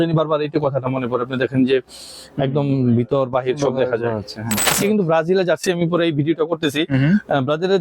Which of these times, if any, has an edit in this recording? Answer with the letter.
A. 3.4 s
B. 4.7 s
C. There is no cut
B